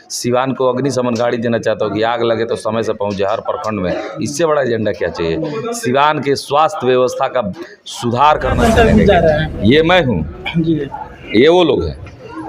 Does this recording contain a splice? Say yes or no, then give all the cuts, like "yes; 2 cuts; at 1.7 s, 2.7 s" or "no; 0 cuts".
yes; 1 cut; at 8.6 s